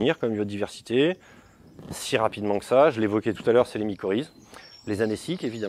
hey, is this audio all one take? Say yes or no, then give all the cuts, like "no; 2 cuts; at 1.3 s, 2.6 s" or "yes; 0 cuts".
no; 1 cut; at 4.4 s